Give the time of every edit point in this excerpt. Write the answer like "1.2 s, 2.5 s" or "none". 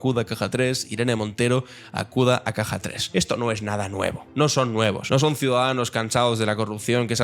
2.9 s, 4.2 s, 5.0 s